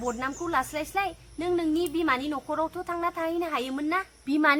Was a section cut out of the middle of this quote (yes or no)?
no